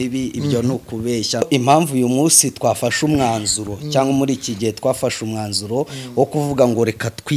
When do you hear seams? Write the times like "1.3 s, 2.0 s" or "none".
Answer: 1.4 s